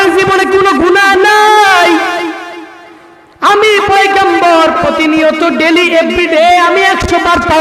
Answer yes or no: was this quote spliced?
no